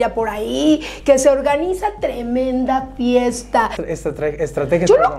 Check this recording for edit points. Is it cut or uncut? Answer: cut